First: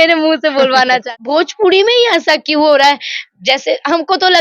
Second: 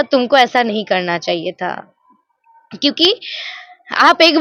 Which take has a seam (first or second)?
first